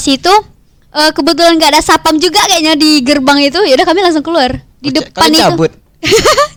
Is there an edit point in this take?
no; 0 cuts

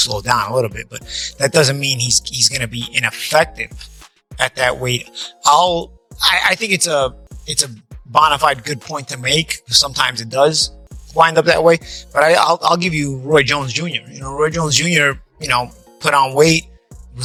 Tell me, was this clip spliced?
no; 0 cuts

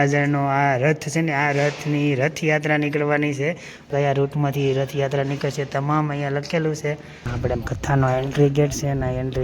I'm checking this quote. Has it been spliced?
yes; 2 cuts; at 3.9 s, 7.3 s

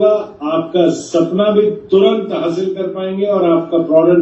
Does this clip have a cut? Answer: no; 0 cuts

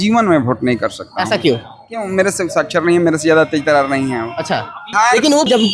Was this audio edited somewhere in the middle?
no; 0 cuts

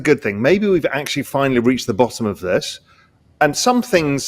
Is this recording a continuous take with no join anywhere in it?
yes; 0 cuts

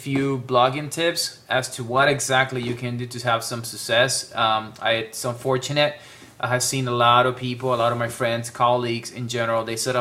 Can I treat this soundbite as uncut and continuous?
no; 1 cut; at 6.0 s

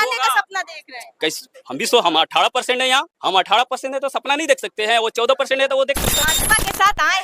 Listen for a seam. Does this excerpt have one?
yes; 2 cuts; at 3.1 s, 6.3 s

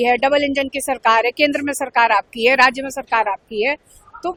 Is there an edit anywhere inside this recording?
no; 0 cuts

